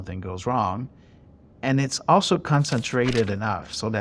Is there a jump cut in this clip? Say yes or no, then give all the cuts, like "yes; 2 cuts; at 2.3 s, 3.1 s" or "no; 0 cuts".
no; 0 cuts